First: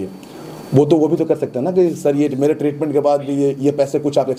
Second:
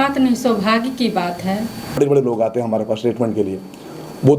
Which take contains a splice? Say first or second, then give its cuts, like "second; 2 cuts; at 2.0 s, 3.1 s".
second; 1 cut; at 2.0 s